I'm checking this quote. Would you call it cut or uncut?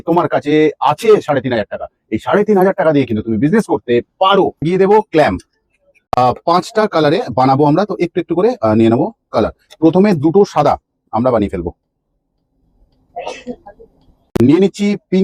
cut